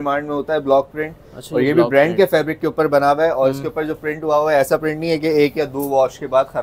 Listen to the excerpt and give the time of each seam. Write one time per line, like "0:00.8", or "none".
none